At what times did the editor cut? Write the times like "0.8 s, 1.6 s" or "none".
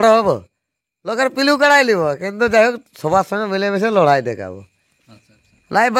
none